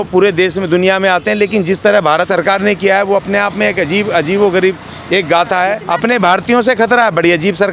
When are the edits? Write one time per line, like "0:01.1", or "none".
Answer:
0:02.3
0:05.8